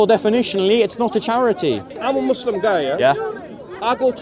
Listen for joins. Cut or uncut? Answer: cut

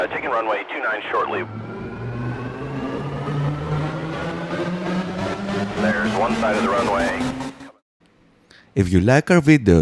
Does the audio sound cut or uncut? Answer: cut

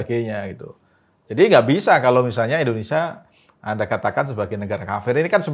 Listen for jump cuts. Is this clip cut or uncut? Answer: uncut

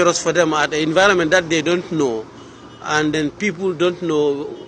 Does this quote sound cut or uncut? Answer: uncut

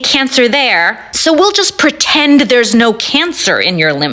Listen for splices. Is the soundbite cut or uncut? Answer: cut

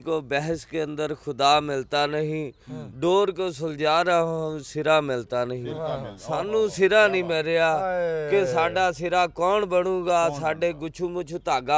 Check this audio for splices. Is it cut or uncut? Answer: uncut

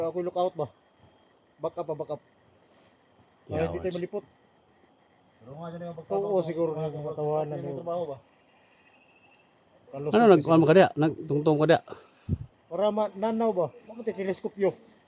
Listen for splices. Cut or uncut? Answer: uncut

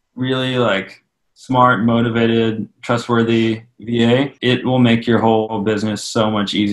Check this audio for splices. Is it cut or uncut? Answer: cut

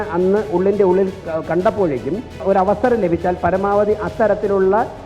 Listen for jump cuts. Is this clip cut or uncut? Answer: cut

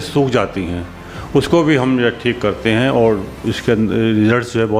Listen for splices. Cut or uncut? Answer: uncut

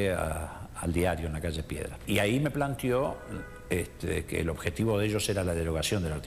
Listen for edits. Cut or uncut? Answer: cut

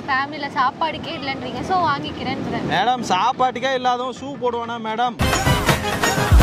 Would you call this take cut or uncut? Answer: uncut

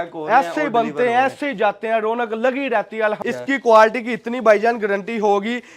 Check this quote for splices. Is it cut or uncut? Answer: cut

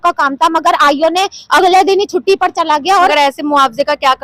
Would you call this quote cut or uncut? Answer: cut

